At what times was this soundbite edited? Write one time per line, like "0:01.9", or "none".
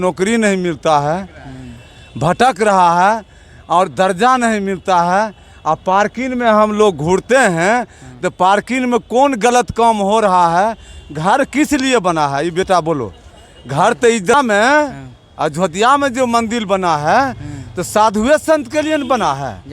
0:14.3